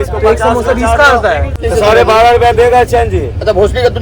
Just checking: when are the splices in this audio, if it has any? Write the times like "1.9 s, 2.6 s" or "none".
1.5 s